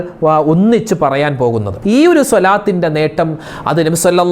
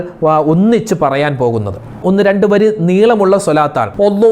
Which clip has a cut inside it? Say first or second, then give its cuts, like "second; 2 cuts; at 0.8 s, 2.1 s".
first; 1 cut; at 1.7 s